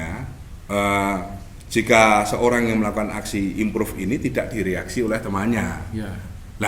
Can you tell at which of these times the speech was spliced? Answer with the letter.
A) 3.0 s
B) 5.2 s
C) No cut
C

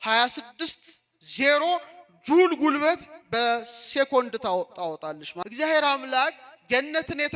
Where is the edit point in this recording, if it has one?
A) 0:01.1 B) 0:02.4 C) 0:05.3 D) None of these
C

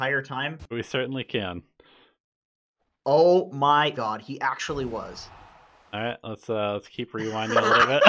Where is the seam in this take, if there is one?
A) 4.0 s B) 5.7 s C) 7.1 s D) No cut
A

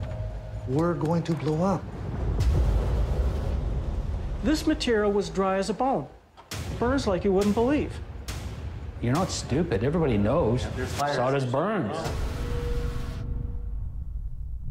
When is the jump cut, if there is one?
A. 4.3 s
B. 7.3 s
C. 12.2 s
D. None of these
B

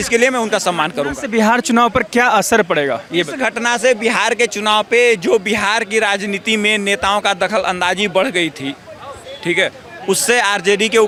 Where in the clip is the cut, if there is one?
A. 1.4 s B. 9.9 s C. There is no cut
C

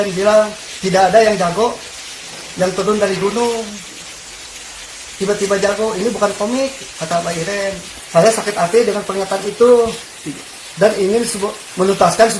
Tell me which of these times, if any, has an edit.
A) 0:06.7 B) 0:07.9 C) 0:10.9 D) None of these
B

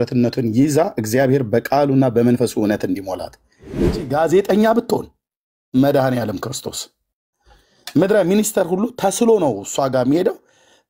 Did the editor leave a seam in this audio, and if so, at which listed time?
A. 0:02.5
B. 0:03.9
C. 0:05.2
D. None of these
B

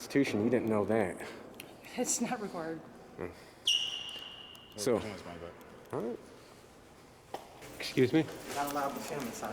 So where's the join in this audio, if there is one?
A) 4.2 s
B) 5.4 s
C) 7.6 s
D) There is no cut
C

